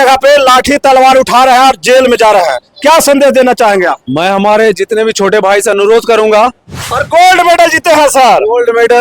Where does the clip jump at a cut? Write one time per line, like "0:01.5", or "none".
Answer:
0:07.0